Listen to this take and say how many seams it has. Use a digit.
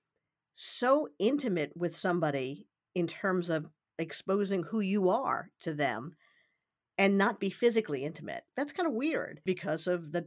2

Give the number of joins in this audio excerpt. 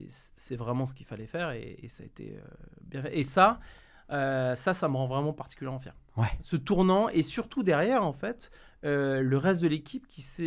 0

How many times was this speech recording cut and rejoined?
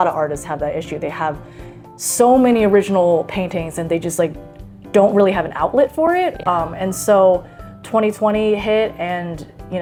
0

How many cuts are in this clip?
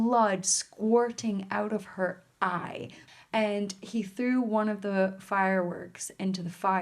1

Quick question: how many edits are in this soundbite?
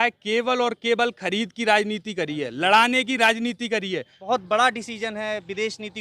1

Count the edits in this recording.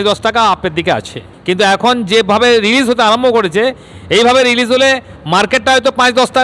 1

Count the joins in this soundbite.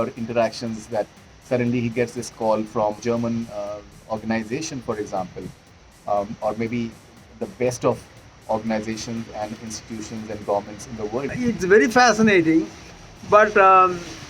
2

